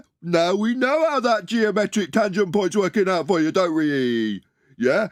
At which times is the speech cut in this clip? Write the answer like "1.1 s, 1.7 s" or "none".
none